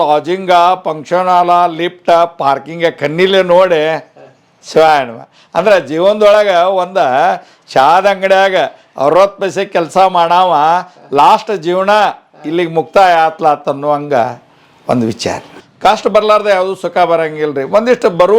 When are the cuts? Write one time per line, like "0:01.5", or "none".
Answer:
0:15.5